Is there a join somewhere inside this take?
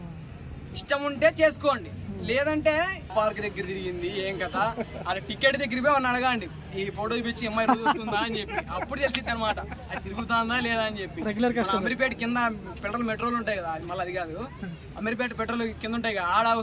yes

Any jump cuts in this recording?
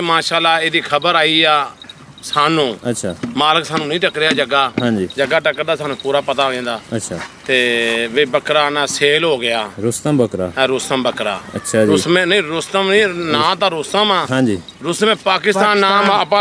no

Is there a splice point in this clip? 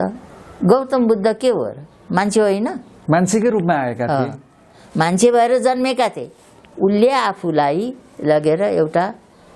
no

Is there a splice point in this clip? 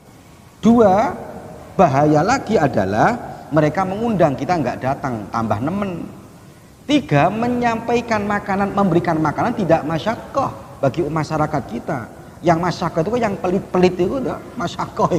no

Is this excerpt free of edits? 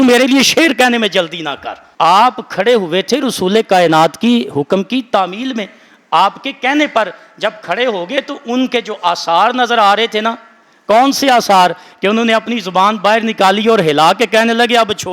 yes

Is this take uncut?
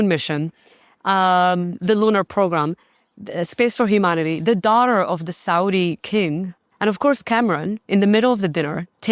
no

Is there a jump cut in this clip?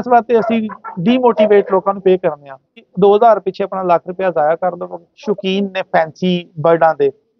yes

